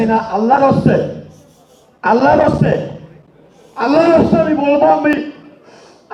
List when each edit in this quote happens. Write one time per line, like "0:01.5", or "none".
none